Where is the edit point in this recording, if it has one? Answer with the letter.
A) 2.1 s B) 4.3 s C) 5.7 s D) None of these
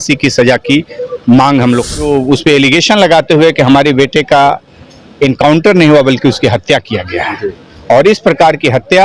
A